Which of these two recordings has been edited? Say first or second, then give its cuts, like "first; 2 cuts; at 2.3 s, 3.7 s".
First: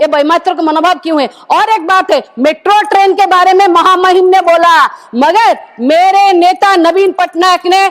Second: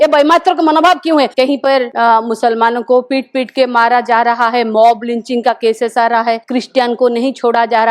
second; 2 cuts; at 1.5 s, 6.4 s